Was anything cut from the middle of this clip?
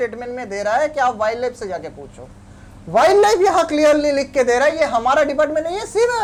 no; 0 cuts

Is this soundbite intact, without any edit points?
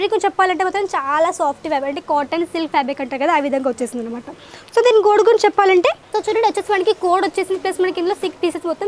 yes; 0 cuts

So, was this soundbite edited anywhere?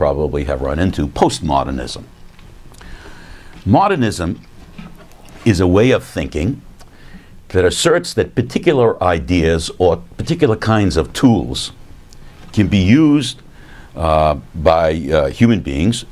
no; 0 cuts

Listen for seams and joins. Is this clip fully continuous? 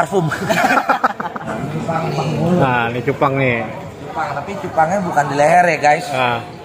no; 1 cut; at 1.4 s

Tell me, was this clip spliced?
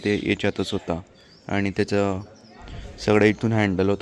no; 0 cuts

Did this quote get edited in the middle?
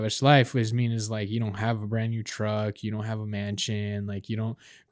no; 0 cuts

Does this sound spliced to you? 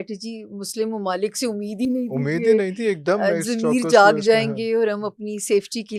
no; 0 cuts

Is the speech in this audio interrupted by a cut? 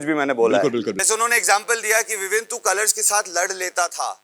yes; 1 cut; at 1.0 s

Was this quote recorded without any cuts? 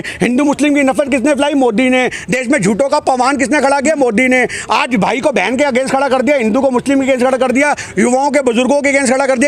yes; 0 cuts

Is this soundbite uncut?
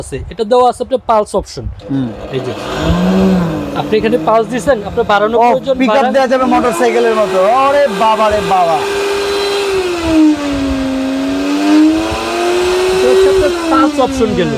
yes; 0 cuts

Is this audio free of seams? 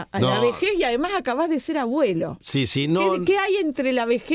yes; 0 cuts

